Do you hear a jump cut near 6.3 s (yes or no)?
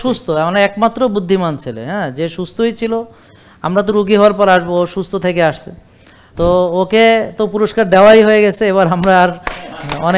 yes